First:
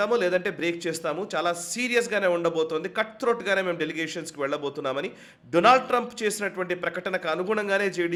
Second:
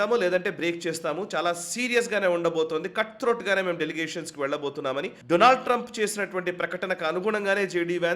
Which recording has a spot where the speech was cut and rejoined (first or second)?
second